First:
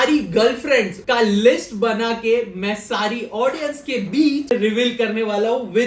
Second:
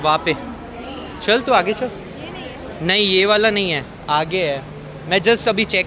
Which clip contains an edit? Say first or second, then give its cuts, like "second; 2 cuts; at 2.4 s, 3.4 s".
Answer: first; 2 cuts; at 1.0 s, 4.5 s